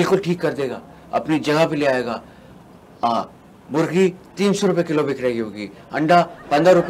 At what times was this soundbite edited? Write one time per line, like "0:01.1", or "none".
none